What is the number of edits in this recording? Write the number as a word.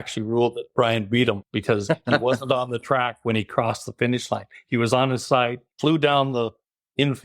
two